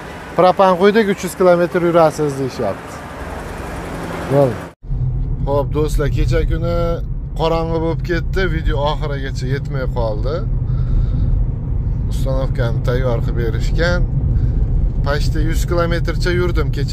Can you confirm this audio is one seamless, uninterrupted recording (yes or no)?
yes